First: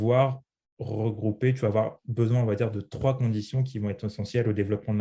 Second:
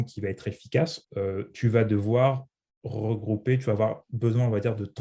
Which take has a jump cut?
second; 1 cut; at 1.1 s

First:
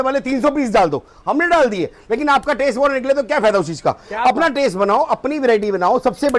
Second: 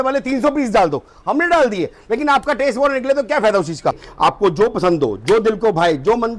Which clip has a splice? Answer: second; 1 cut; at 4.1 s

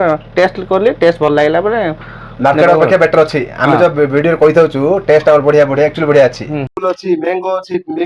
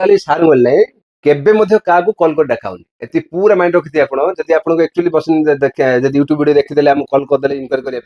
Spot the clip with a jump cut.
first; 1 cut; at 6.7 s

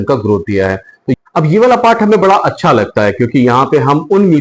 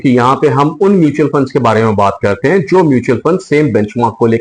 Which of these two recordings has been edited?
first; 1 cut; at 1.2 s

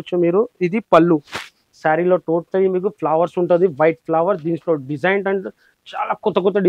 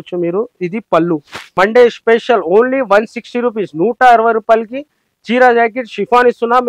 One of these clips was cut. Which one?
second; 1 cut; at 1.4 s

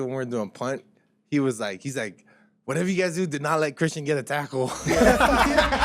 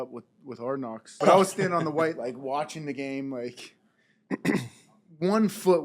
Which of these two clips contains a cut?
second; 1 cut; at 1.1 s

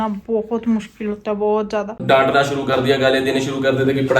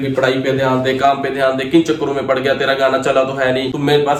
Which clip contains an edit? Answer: first; 1 cut; at 2.0 s

